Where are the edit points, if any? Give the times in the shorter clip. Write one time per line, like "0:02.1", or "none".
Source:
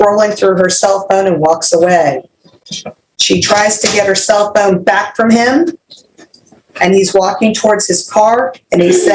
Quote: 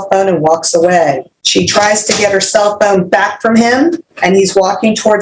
0:01.3
0:04.1